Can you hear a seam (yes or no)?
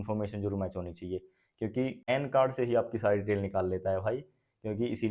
yes